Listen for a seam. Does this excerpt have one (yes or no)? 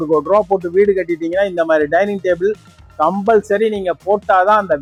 no